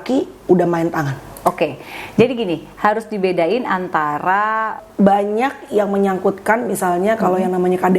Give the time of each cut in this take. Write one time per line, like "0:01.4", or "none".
0:04.8